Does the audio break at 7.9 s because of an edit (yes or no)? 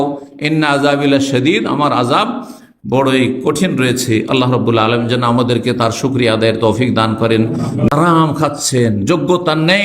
yes